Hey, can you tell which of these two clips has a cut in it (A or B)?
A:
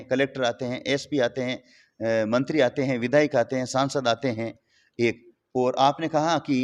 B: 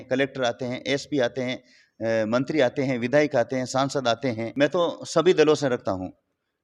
B